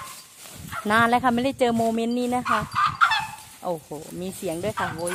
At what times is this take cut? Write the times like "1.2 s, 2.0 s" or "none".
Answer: none